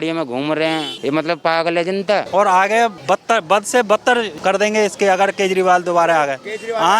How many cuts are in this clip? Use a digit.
4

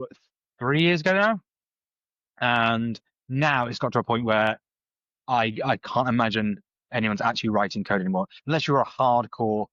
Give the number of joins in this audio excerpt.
0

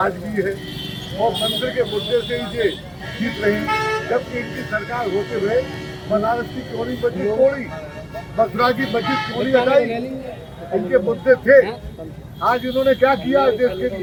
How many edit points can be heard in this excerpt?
0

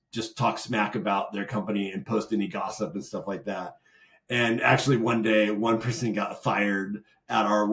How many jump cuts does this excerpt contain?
0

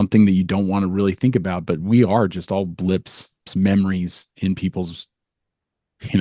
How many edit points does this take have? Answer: 1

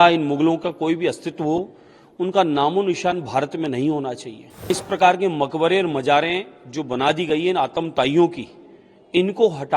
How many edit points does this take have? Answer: 1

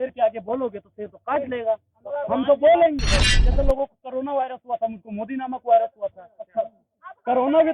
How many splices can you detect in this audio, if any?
1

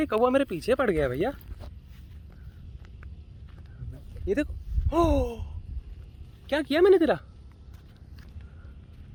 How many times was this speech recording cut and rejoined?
0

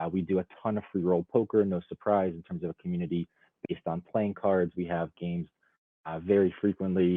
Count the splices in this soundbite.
0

